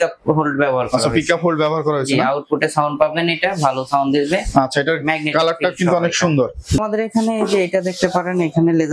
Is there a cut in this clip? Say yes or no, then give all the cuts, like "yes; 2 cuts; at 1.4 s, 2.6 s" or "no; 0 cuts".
yes; 1 cut; at 6.8 s